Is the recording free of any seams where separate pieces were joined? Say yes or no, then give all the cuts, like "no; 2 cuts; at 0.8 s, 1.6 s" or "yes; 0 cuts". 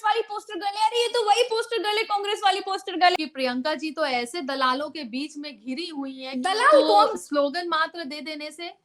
no; 2 cuts; at 3.1 s, 6.5 s